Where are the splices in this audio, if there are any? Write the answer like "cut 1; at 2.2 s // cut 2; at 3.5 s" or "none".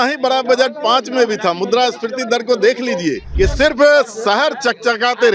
cut 1; at 3.2 s